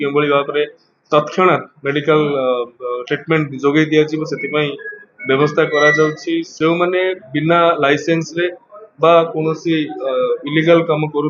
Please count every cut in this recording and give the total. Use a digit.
1